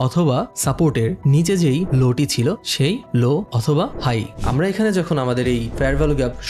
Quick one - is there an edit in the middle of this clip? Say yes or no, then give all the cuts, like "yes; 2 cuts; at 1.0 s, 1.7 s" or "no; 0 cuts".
yes; 1 cut; at 4.4 s